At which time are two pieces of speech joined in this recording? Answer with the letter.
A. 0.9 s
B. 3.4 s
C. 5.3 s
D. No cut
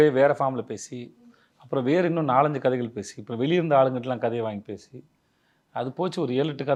D